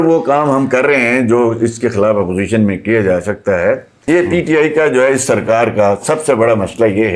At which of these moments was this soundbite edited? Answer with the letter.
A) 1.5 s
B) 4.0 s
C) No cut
B